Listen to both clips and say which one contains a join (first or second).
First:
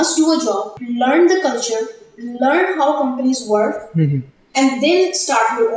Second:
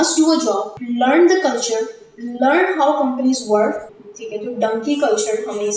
second